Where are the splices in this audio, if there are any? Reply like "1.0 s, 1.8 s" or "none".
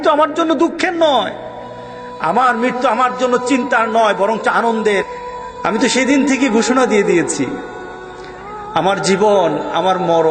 5.1 s